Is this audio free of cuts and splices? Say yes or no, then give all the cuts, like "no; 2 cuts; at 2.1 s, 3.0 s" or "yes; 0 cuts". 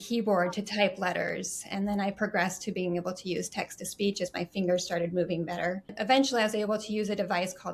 no; 1 cut; at 5.9 s